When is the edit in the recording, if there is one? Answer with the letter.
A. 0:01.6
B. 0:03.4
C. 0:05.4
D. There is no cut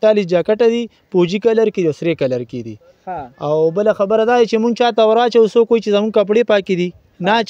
D